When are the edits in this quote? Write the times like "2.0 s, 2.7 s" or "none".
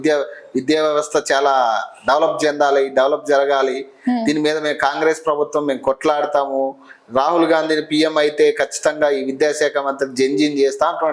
none